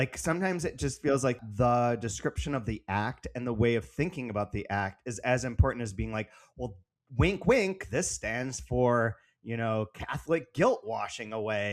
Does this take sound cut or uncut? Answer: cut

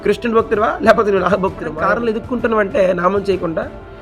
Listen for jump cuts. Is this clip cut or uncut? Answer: cut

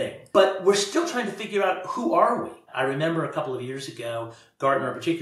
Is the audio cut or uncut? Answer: cut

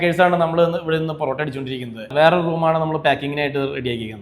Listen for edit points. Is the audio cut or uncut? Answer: cut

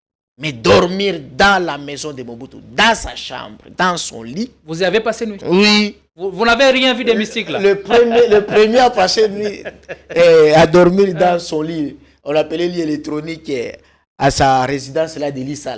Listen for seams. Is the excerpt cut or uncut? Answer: uncut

